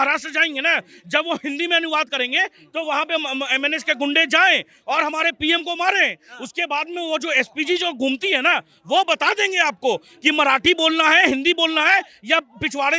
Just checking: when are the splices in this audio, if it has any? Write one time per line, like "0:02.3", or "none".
none